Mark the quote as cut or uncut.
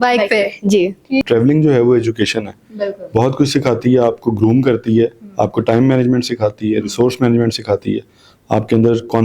cut